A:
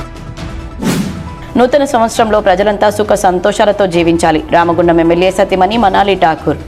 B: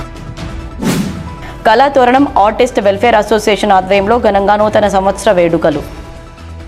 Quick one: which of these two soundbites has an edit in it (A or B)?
B